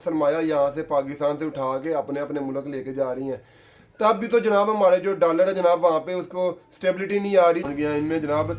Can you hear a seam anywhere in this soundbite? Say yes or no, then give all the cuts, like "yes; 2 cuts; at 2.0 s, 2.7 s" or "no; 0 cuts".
yes; 1 cut; at 7.7 s